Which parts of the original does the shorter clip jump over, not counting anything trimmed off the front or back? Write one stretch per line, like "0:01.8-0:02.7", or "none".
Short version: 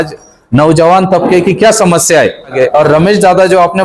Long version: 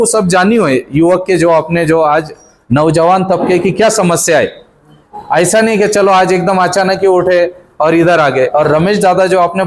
0:04.7-0:08.3

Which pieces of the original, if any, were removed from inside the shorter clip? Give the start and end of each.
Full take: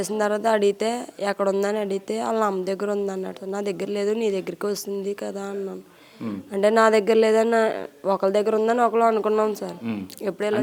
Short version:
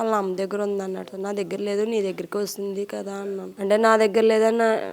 0:05.8-0:06.4

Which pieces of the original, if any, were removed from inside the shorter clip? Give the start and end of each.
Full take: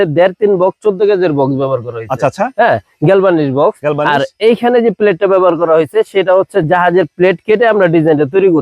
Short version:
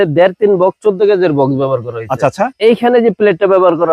0:02.5-0:04.3

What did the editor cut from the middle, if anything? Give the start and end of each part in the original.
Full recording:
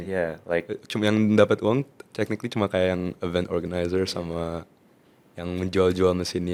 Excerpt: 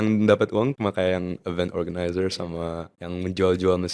0:01.9-0:02.5
0:04.7-0:05.3

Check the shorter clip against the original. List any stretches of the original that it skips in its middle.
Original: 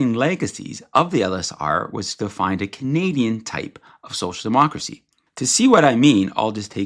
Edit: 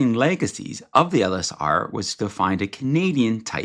none

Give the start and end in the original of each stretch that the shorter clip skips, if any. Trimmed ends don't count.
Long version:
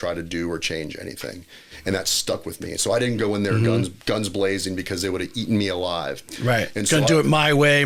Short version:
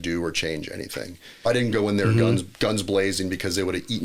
0:01.7-0:02.9

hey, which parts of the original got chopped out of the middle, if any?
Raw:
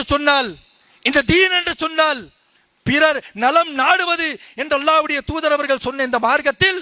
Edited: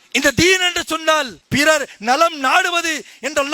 0:02.3-0:02.7

